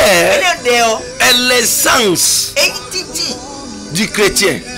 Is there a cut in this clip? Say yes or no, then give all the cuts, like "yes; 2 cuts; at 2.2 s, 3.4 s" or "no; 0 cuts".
no; 0 cuts